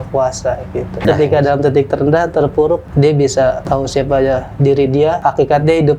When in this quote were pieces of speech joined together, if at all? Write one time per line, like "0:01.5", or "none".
0:01.0
0:02.9
0:03.6
0:05.2